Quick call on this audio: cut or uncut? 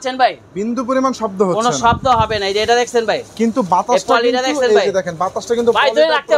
uncut